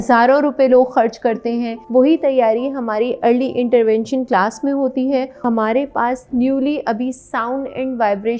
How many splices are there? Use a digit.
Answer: 2